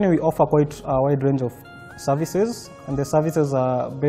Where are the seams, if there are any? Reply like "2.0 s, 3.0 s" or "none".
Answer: 1.6 s